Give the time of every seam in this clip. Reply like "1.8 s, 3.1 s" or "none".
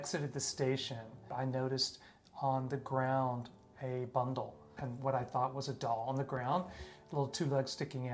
1.2 s, 4.7 s